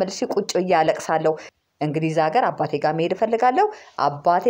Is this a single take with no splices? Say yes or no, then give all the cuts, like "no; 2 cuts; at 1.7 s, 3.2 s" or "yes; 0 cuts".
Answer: no; 1 cut; at 1.5 s